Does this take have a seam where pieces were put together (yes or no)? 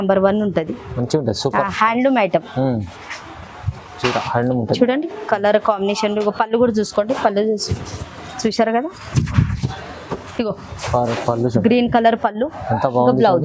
no